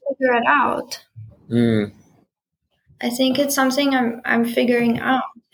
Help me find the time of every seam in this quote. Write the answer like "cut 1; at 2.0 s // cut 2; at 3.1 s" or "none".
none